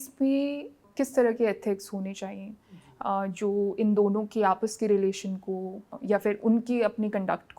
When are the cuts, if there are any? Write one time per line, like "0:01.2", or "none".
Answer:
0:00.8
0:05.9